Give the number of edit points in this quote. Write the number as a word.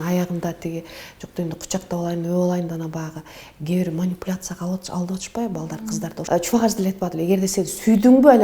one